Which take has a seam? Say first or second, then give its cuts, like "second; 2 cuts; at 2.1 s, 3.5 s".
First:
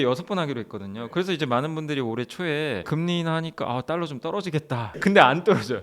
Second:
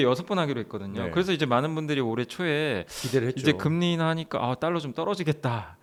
first; 2 cuts; at 2.9 s, 5.0 s